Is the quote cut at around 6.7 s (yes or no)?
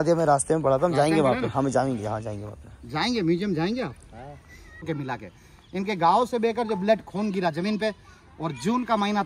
no